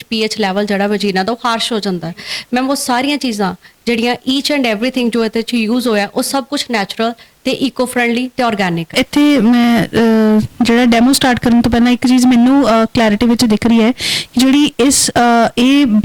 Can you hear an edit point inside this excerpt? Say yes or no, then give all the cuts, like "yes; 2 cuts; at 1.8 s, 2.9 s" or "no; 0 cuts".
yes; 1 cut; at 8.9 s